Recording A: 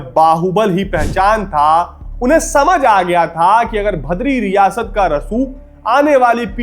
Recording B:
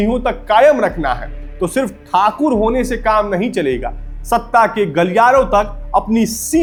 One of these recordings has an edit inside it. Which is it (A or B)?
A